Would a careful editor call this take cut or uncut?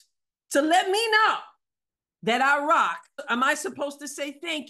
cut